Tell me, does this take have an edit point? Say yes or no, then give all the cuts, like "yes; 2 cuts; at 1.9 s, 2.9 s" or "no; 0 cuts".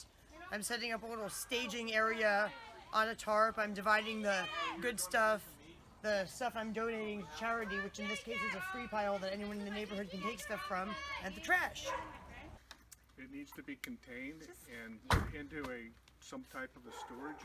yes; 1 cut; at 12.4 s